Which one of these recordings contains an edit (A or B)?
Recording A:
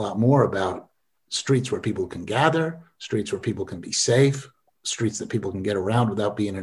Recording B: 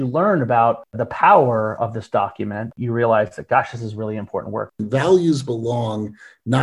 B